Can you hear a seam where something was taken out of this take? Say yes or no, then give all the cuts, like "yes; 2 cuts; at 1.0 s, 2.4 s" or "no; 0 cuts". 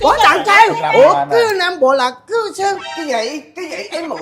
yes; 1 cut; at 2.9 s